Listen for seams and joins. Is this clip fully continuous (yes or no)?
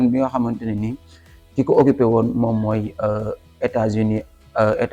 yes